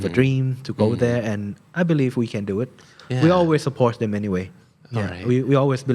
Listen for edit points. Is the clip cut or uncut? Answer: uncut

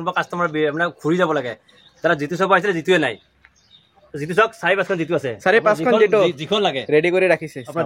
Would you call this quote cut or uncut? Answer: uncut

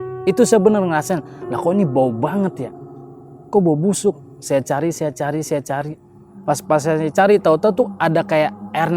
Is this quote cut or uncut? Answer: cut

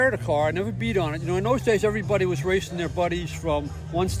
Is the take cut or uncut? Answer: uncut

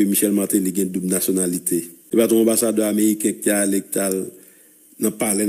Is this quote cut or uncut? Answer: cut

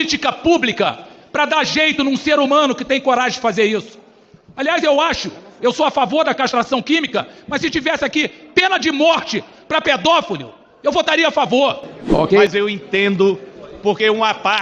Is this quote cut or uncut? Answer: cut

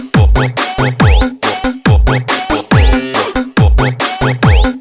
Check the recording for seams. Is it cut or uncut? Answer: uncut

